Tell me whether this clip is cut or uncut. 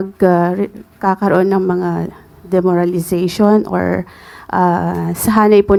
uncut